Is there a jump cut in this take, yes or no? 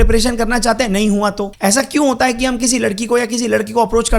yes